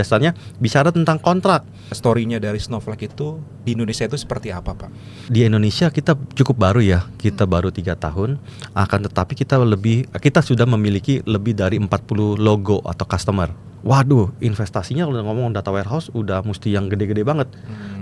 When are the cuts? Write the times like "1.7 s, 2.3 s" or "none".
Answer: 1.9 s, 5.2 s, 13.7 s